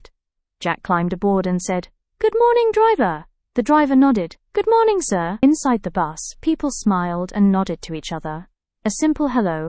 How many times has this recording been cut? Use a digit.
1